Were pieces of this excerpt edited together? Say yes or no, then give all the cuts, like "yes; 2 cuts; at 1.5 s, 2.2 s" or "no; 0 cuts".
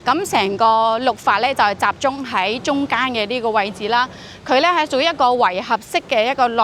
no; 0 cuts